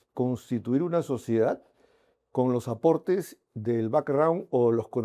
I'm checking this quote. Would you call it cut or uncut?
uncut